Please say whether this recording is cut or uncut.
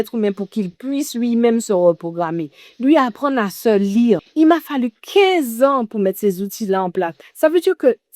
cut